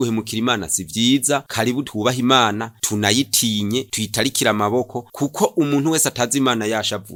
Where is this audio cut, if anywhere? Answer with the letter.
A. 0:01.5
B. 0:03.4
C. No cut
C